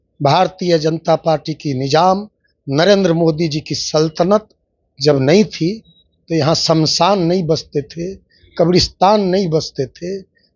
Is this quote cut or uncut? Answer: uncut